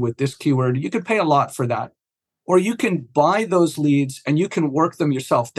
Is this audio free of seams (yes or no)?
yes